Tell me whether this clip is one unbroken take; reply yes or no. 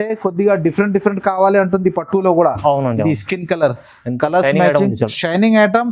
yes